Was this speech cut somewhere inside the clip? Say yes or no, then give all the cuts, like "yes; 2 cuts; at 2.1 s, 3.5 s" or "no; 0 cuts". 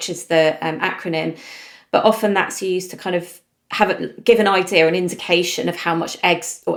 no; 0 cuts